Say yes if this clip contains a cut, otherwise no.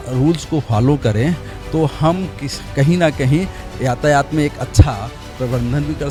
no